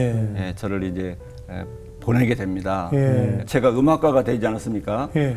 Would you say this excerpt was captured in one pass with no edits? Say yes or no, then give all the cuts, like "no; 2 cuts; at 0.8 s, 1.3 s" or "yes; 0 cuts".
no; 1 cut; at 3.4 s